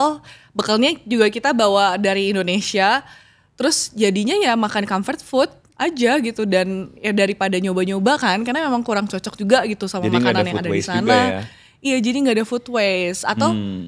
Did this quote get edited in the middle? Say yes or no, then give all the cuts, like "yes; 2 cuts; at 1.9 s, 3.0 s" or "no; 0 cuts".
no; 0 cuts